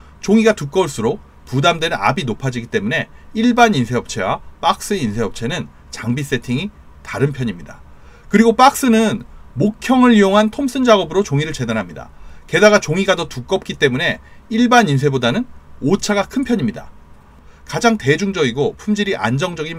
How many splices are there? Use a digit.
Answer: 1